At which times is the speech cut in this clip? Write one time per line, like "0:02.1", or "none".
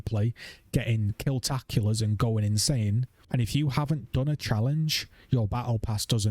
0:03.1